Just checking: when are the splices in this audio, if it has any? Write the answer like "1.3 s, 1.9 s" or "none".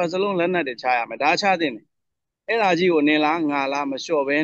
2.0 s